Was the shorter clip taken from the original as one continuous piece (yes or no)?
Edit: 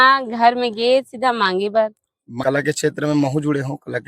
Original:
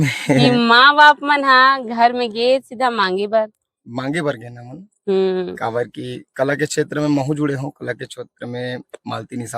no